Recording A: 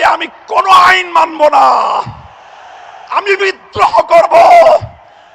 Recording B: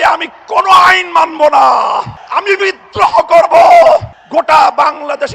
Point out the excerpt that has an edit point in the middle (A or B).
B